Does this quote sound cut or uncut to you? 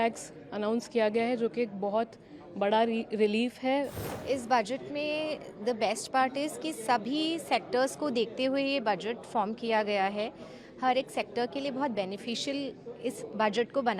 cut